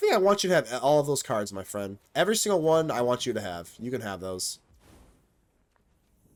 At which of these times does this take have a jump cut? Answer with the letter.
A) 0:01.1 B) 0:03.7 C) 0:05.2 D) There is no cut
D